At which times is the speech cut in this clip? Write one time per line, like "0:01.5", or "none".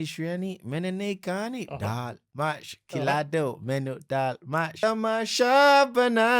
0:04.7